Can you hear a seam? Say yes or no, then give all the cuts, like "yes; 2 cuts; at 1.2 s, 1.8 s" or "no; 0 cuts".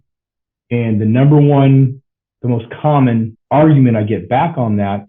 yes; 1 cut; at 3.4 s